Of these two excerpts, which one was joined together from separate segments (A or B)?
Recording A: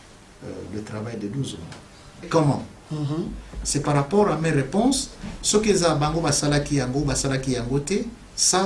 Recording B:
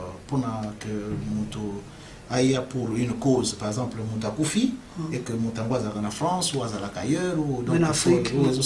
A